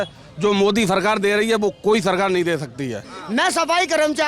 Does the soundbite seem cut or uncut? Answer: cut